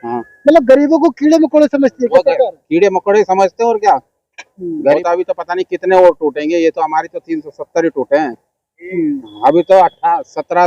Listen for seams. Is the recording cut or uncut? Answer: cut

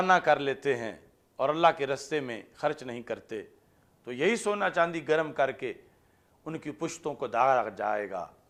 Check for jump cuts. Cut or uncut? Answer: uncut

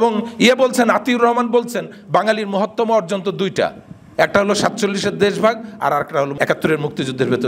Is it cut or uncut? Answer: uncut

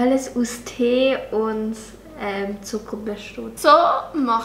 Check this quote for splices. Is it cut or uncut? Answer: cut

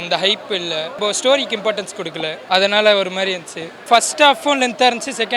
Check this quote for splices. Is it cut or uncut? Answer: cut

